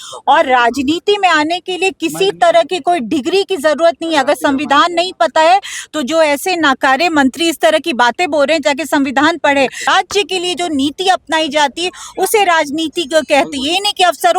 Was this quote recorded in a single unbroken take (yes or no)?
no